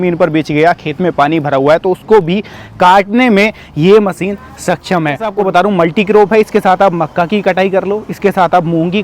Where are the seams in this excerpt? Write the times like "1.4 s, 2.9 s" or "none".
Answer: 5.3 s